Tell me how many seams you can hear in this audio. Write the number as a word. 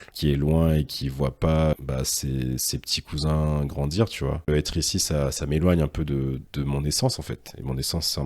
two